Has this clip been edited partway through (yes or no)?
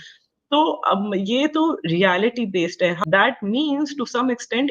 yes